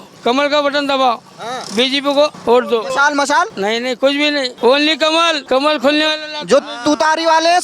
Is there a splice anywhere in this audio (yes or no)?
yes